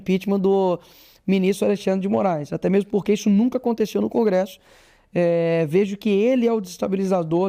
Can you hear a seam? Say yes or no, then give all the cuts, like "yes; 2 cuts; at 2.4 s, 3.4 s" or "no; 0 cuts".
no; 0 cuts